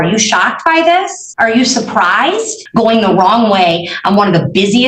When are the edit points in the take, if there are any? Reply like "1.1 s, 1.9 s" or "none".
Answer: 1.2 s, 2.6 s